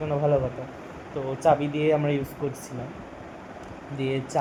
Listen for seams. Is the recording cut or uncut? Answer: uncut